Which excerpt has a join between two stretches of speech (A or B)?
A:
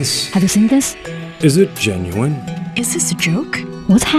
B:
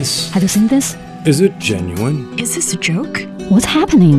B